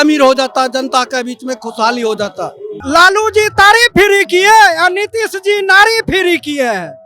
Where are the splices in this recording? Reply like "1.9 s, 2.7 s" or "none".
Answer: 2.8 s